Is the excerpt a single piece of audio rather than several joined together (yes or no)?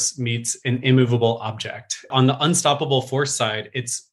no